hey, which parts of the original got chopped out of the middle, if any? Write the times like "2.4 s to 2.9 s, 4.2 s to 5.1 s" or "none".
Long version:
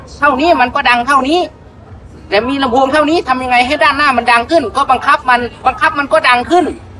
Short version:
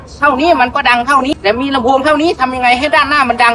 1.3 s to 2.2 s